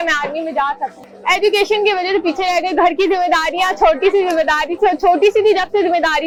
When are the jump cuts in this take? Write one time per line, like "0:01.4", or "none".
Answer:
none